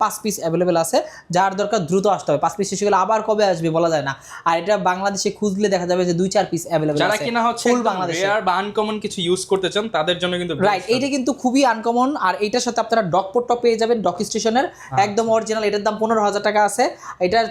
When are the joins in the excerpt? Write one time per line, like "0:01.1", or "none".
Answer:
none